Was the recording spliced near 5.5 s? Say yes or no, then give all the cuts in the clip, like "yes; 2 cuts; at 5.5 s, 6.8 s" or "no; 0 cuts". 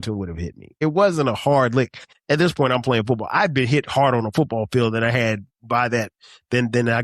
yes; 3 cuts; at 0.8 s, 2.1 s, 5.5 s